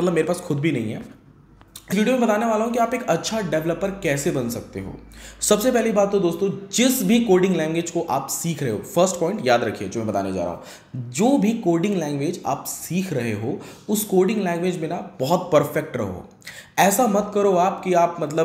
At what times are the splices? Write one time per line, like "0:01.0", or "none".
0:01.9